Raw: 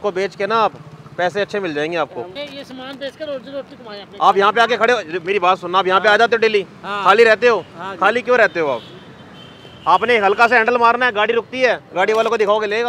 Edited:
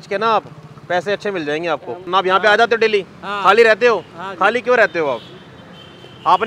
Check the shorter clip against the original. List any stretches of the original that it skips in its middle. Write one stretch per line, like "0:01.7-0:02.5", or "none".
0:02.3-0:05.6